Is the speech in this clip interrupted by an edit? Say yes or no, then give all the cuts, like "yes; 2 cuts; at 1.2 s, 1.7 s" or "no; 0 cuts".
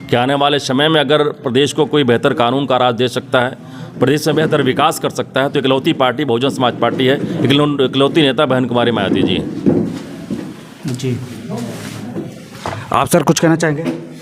no; 0 cuts